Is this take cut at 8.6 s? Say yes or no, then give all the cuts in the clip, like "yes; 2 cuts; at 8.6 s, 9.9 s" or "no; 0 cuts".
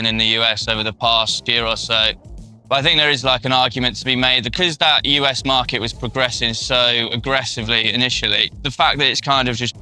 yes; 3 cuts; at 1.4 s, 4.5 s, 8.6 s